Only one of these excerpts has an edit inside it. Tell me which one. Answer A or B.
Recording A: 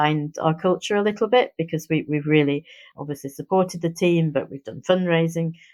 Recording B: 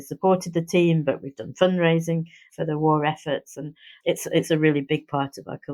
B